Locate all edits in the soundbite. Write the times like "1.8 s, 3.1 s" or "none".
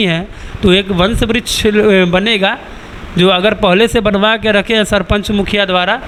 none